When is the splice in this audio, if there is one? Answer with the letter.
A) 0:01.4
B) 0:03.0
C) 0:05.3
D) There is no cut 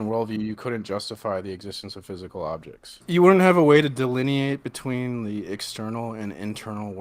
B